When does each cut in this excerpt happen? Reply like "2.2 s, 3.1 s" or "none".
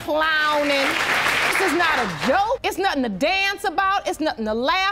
none